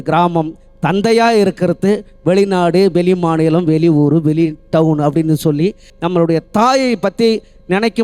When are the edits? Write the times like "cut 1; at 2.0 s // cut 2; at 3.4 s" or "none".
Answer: cut 1; at 5.9 s